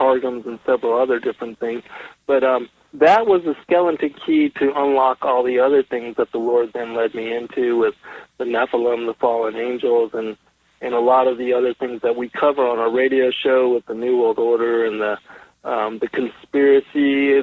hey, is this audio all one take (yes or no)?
yes